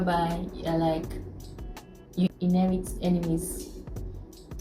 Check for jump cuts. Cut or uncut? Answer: uncut